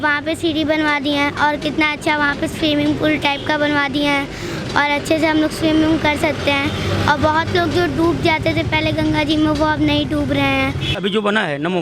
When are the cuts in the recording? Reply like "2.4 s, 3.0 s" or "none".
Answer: 10.9 s